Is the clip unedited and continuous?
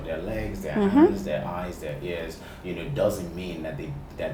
yes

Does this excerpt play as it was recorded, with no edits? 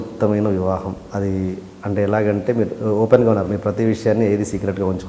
yes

